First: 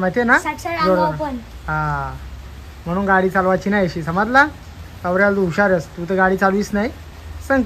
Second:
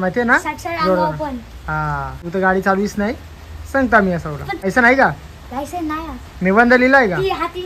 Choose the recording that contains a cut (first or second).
second